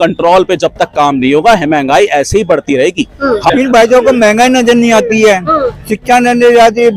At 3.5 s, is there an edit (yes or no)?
yes